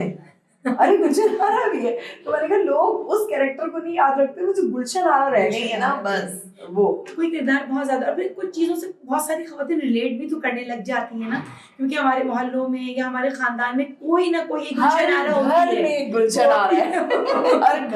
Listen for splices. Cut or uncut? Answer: uncut